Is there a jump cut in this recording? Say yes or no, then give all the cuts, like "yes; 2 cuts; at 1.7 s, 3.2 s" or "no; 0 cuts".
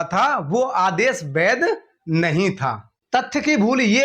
yes; 1 cut; at 2.9 s